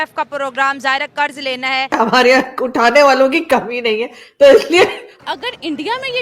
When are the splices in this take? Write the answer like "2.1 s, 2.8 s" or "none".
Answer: 1.9 s, 5.1 s